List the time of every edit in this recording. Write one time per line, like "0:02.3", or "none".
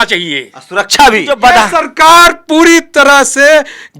0:01.3